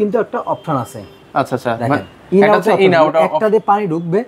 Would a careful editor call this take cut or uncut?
uncut